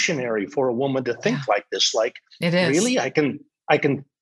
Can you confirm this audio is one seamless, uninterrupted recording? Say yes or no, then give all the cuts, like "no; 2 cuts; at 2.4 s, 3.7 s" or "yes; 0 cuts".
yes; 0 cuts